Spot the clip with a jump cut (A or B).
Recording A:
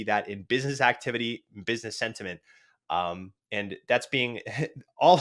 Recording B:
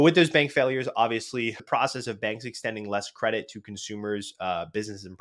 B